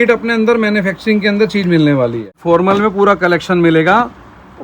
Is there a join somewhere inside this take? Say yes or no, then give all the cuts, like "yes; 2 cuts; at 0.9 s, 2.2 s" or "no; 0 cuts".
yes; 1 cut; at 2.4 s